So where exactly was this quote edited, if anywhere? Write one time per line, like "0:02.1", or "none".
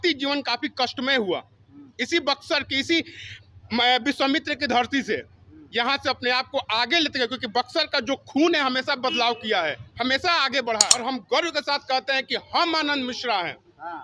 0:11.0